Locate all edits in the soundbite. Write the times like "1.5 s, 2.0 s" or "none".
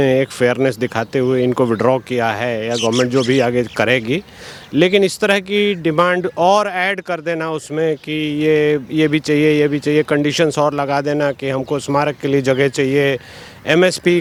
none